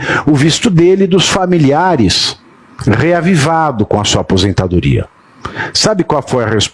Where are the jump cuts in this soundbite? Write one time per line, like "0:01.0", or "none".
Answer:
none